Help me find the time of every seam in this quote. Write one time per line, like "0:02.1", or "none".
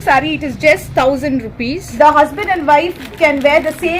0:01.9